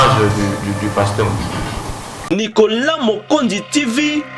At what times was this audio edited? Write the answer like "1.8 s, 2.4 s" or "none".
2.1 s

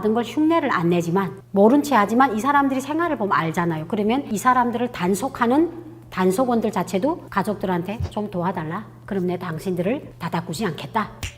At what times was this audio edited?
none

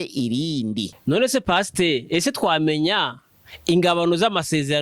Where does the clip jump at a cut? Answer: 0.9 s

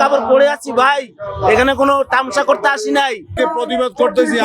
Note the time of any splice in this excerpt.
3.4 s

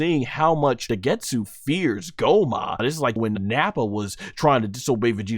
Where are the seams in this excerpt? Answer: 0.9 s, 3.2 s

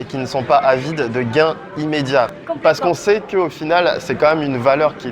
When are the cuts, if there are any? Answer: 2.4 s

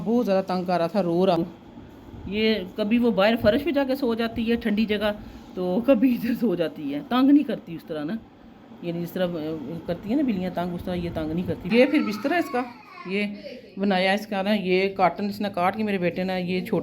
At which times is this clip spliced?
1.4 s, 11.7 s

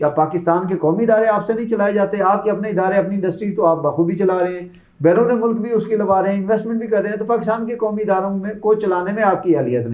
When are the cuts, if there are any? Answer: none

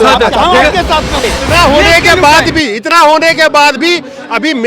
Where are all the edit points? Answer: 1.3 s

